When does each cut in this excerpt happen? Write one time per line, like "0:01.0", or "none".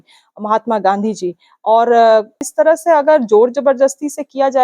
0:02.4